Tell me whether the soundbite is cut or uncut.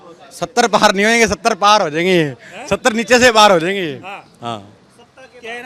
uncut